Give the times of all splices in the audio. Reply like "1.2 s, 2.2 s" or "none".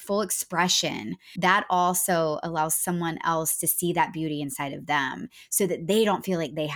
1.2 s